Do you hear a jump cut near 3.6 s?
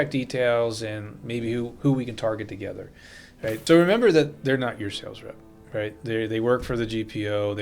yes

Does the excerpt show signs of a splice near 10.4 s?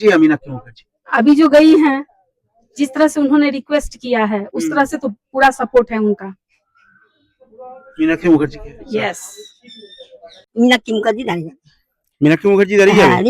yes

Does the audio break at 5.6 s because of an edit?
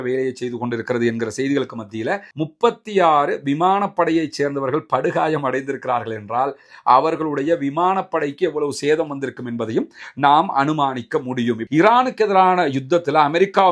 no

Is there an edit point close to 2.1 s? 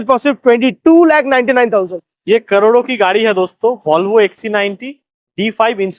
yes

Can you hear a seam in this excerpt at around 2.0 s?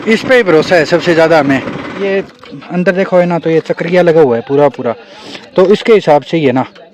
yes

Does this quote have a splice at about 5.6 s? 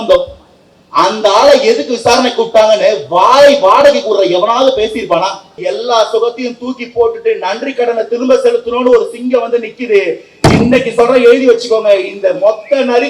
yes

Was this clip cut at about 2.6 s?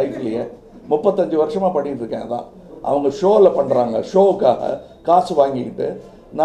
no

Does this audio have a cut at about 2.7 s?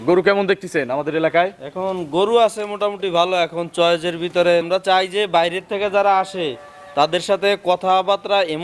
no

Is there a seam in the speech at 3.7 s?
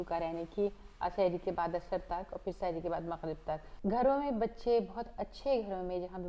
yes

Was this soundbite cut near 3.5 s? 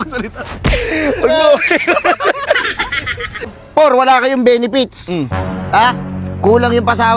yes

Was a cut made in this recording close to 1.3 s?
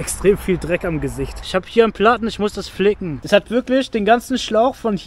yes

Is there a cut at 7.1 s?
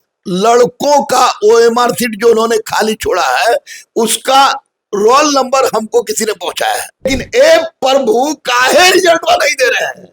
yes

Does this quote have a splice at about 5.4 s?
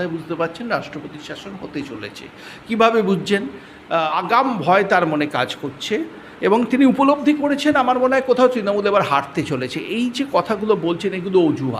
no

